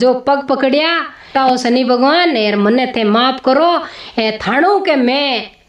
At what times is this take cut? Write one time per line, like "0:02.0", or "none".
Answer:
0:01.3